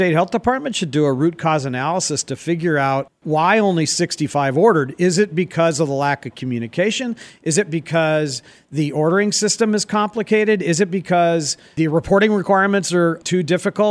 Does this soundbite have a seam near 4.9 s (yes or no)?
no